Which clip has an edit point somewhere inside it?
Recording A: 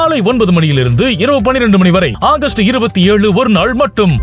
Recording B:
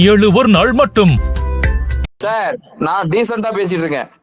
B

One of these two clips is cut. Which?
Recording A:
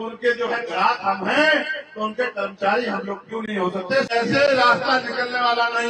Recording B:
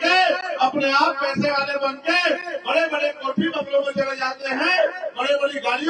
A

